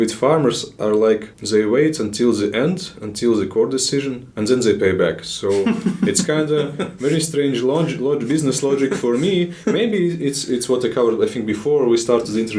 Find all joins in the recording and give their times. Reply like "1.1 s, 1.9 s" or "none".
1.3 s, 4.2 s